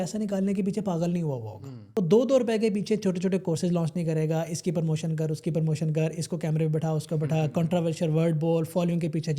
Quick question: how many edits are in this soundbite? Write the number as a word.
one